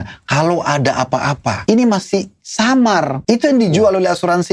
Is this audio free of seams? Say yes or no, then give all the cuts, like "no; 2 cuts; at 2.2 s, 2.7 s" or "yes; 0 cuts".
no; 2 cuts; at 1.6 s, 3.2 s